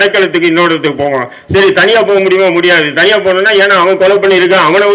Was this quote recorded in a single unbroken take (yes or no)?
yes